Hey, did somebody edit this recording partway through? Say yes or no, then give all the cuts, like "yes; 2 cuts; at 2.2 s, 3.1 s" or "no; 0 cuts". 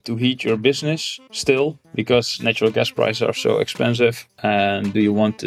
yes; 2 cuts; at 1.8 s, 4.3 s